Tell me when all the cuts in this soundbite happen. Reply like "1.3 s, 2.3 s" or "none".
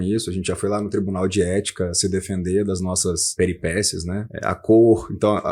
3.3 s, 4.3 s

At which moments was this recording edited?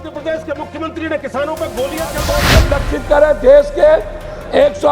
2.5 s

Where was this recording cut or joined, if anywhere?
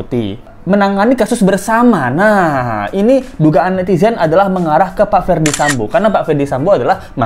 none

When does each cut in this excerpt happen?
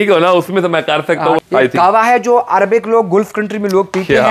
1.4 s

